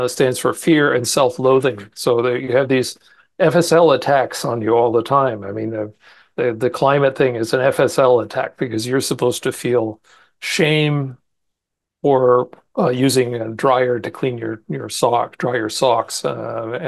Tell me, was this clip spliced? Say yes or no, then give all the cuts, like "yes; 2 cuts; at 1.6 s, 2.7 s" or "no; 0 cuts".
no; 0 cuts